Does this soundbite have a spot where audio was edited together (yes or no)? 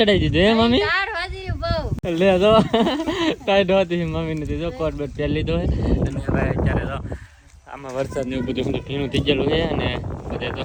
no